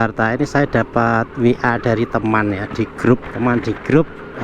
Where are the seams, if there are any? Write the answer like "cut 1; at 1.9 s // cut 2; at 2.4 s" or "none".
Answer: cut 1; at 3.3 s